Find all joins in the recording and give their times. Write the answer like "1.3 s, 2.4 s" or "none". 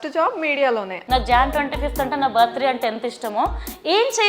1.0 s

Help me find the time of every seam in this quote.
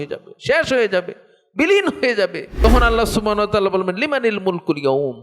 2.6 s

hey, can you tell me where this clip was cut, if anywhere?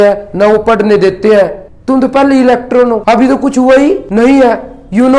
1.6 s, 3.0 s, 4.0 s

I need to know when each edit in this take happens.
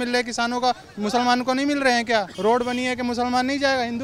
2.3 s

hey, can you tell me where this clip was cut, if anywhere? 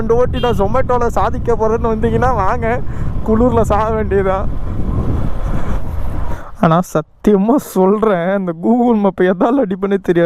6.4 s

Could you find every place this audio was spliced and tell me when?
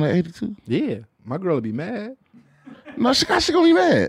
1.1 s

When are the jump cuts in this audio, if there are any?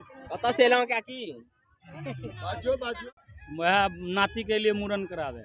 3.0 s

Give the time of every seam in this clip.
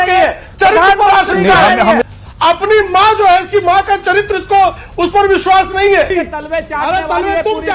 2.0 s, 6.1 s

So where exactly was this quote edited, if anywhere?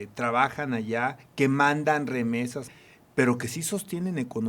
2.8 s

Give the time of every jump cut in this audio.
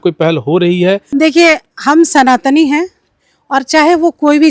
1.0 s

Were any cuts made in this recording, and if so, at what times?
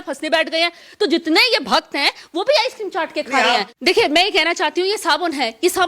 3.8 s

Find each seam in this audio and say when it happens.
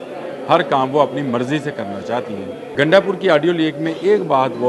2.6 s

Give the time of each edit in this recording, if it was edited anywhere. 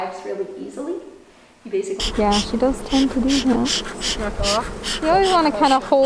2.0 s

